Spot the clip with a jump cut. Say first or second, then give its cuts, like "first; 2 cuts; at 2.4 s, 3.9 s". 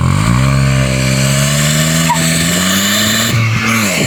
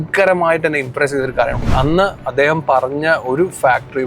second; 1 cut; at 1.6 s